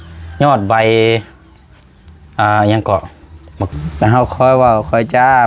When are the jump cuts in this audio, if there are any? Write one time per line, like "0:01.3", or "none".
0:03.6